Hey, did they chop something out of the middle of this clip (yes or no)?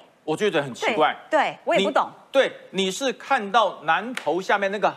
no